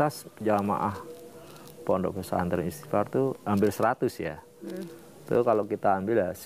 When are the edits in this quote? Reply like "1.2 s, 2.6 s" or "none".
none